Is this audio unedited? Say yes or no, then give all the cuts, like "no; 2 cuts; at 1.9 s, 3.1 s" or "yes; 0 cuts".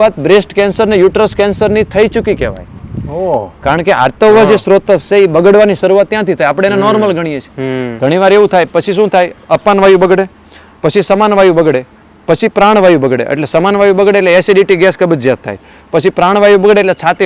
yes; 0 cuts